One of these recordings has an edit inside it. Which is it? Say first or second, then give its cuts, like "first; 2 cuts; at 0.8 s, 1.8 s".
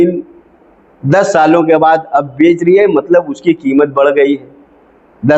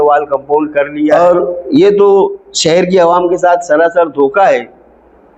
second; 1 cut; at 1.2 s